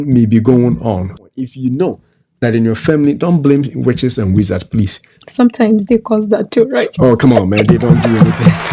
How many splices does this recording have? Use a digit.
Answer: 1